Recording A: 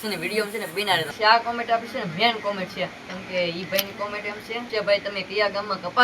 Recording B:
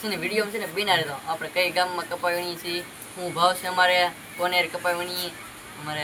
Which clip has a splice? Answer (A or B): A